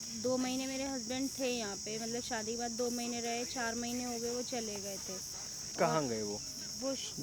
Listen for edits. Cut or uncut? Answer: uncut